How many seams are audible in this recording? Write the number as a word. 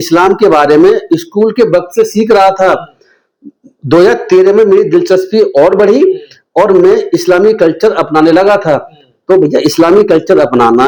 zero